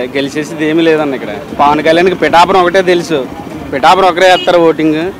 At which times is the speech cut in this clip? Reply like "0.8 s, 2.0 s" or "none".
1.4 s